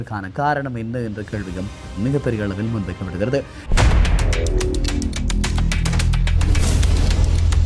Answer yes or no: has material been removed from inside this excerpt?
yes